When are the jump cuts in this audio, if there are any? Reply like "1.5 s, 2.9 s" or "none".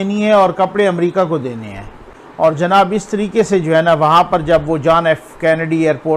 none